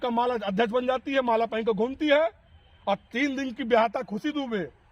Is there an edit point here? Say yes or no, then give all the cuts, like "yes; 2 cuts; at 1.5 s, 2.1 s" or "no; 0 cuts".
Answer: no; 0 cuts